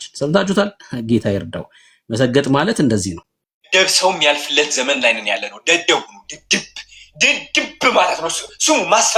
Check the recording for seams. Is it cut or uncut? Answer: uncut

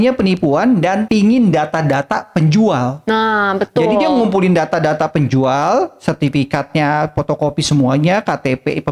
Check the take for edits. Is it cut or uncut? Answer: uncut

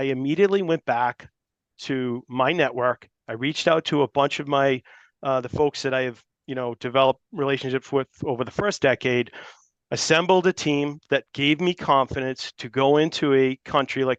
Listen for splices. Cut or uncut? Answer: uncut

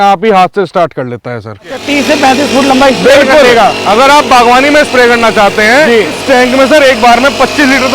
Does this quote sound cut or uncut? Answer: cut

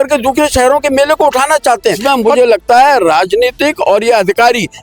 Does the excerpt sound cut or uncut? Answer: cut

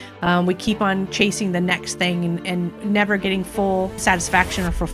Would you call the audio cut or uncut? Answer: cut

